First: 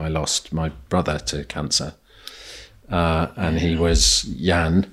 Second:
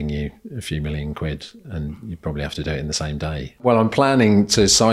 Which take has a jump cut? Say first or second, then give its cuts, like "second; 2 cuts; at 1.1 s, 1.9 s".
second; 1 cut; at 3.6 s